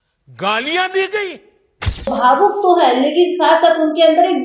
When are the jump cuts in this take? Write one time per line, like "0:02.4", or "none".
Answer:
0:02.1